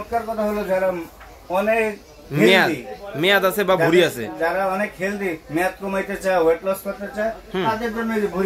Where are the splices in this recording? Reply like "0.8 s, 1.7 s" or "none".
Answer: none

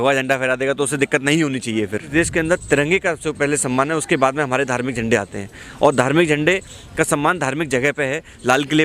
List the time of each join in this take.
2.1 s

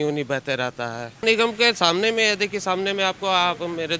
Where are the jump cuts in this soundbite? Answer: 1.2 s

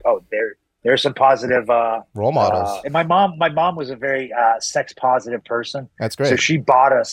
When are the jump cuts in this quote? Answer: 2.1 s, 2.8 s

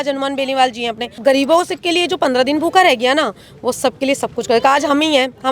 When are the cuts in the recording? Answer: 1.2 s

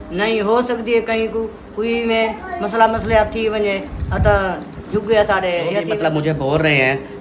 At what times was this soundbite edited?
5.9 s

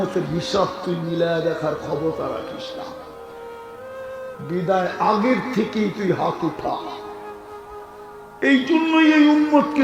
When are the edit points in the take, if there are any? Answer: none

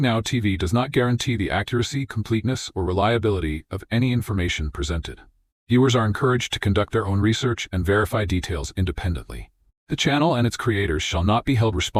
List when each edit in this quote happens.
none

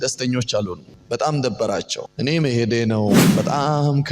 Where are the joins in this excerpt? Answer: 0.9 s, 2.0 s, 3.2 s

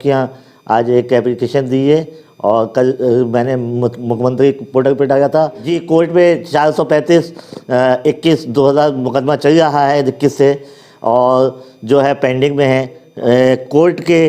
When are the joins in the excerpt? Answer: 5.7 s, 13.0 s

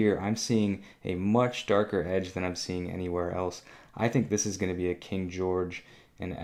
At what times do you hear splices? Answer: none

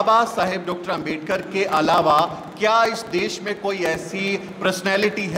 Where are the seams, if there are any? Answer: none

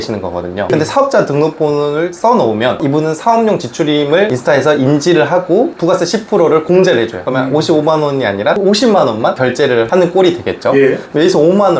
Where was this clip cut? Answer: none

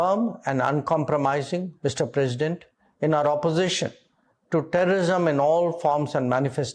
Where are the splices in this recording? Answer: none

